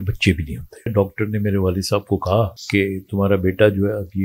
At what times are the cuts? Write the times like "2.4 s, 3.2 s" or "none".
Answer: 0.9 s, 2.6 s